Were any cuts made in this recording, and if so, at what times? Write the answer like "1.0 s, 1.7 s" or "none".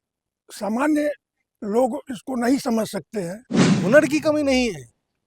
3.7 s

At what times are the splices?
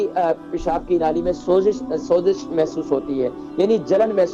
none

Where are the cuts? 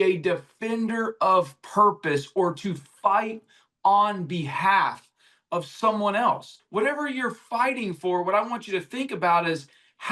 6.6 s

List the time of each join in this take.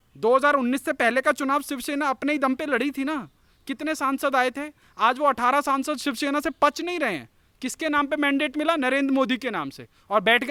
none

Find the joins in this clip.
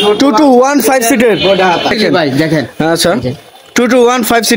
1.9 s

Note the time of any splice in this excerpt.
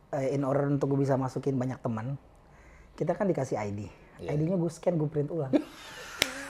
none

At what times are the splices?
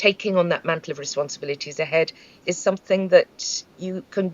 2.3 s

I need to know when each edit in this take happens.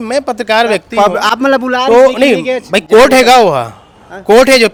none

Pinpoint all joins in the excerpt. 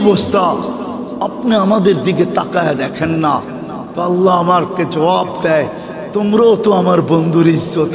none

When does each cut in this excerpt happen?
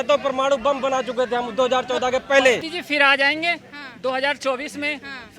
2.8 s

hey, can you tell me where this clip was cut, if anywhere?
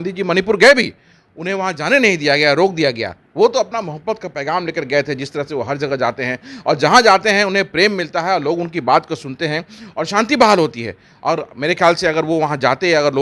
none

